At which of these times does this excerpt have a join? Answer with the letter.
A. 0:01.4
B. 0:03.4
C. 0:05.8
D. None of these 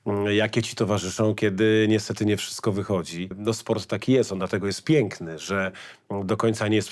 B